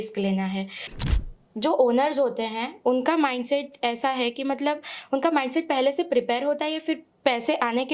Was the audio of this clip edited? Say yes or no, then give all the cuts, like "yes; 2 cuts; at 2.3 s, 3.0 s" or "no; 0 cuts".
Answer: yes; 1 cut; at 1.0 s